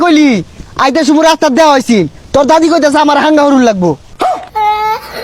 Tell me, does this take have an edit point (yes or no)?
no